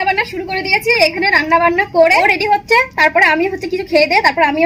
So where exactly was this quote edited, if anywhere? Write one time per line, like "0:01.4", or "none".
0:02.2